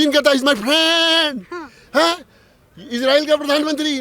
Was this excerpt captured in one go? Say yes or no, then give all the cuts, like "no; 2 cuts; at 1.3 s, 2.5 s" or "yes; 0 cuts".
yes; 0 cuts